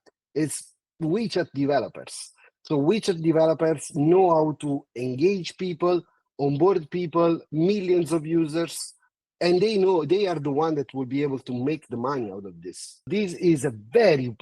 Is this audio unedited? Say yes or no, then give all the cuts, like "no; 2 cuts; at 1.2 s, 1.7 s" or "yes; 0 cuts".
no; 1 cut; at 13.1 s